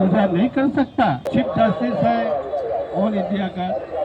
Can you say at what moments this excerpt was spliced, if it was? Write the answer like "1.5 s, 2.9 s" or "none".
0.9 s